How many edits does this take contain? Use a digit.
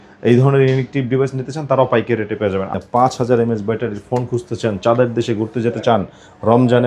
1